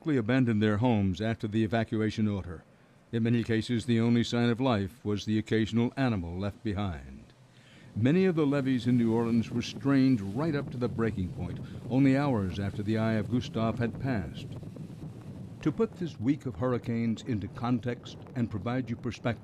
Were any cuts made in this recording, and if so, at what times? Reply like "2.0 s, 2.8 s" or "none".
9.5 s